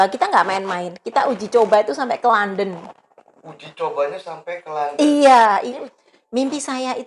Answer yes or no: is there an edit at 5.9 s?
yes